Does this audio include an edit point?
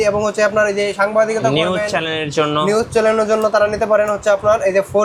no; 0 cuts

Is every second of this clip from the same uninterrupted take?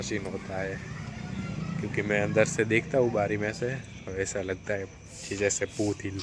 yes; 0 cuts

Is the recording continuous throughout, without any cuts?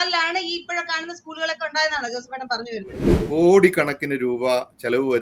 no; 1 cut; at 3.1 s

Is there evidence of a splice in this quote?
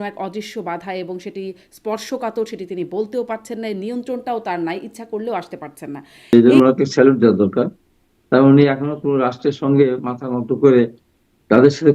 yes; 1 cut; at 6.3 s

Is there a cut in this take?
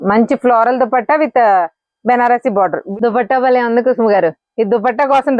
yes; 1 cut; at 2.8 s

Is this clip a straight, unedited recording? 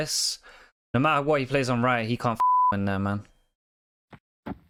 yes; 0 cuts

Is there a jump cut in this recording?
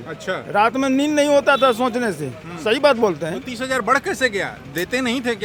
no; 0 cuts

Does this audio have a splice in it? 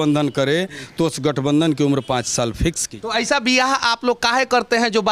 yes; 1 cut; at 2.9 s

